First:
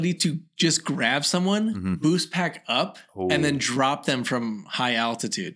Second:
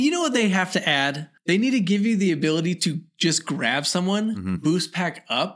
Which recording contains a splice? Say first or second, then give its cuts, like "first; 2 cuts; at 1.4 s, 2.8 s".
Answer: second; 1 cut; at 1.3 s